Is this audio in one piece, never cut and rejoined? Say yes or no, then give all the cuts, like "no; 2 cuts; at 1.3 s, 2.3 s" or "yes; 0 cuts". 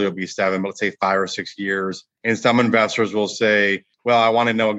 no; 2 cuts; at 2.1 s, 3.9 s